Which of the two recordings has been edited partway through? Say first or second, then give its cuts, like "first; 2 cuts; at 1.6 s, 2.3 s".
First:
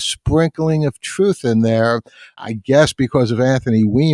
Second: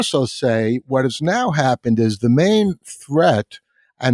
first; 1 cut; at 2.4 s